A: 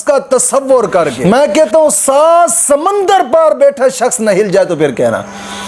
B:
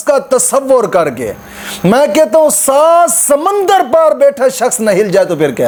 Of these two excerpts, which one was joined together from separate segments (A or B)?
A